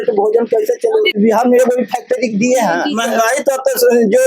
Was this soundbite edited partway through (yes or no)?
yes